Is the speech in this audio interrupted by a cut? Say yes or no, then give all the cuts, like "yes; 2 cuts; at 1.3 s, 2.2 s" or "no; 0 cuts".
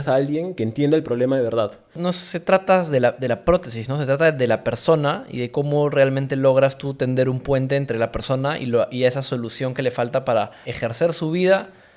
yes; 2 cuts; at 2.0 s, 10.6 s